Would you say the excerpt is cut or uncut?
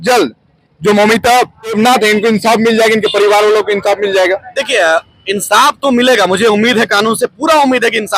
cut